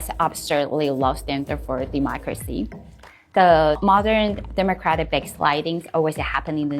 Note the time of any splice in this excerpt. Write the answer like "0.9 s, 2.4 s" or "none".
2.8 s